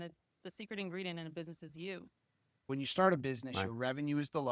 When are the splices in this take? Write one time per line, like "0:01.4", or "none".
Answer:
0:02.7

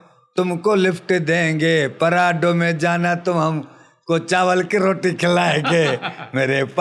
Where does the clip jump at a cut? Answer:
none

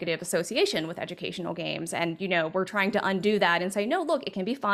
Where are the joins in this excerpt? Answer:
none

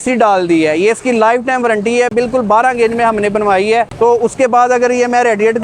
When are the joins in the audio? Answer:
none

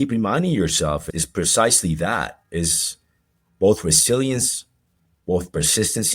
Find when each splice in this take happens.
0:01.0

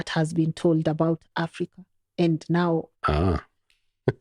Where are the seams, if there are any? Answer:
none

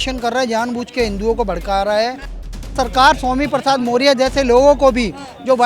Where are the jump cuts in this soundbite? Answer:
0:02.7

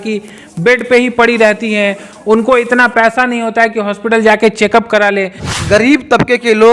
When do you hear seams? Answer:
0:05.4

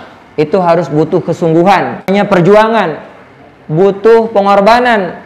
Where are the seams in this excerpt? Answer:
0:02.1

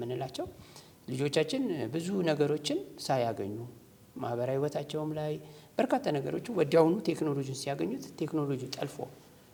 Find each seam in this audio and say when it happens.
none

